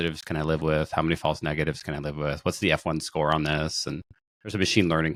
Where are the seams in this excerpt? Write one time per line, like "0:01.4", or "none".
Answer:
none